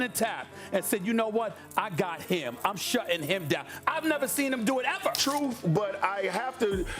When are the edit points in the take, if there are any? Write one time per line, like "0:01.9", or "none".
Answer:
0:05.2